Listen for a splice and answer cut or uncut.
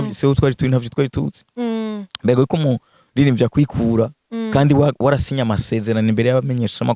uncut